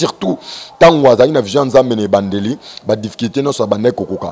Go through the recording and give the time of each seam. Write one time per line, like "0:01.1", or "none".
none

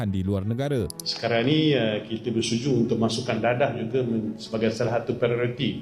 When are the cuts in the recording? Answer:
0:01.0

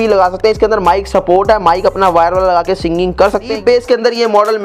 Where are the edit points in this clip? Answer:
0:03.5

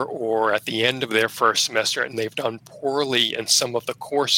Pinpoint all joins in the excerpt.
none

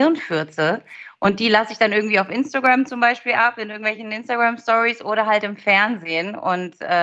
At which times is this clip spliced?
none

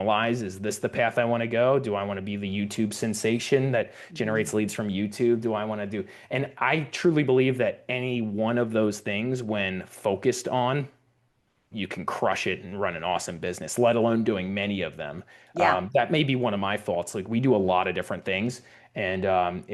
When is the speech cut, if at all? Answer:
none

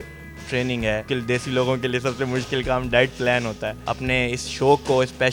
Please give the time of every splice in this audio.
0:01.0
0:03.8

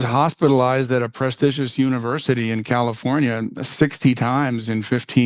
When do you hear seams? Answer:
none

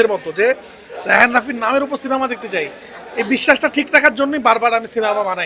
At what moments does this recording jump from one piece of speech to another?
none

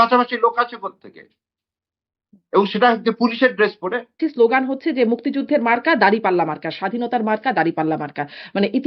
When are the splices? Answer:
0:04.2

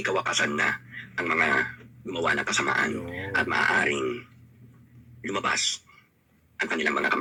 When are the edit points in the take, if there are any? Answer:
none

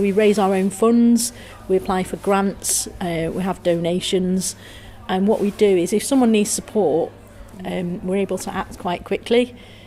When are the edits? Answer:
0:07.5

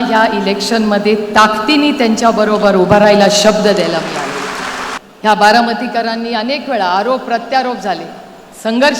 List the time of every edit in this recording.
0:05.0

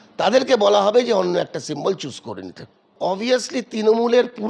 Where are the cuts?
0:03.0

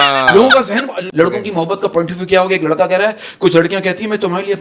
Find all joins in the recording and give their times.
0:01.0

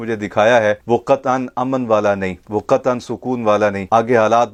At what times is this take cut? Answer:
none

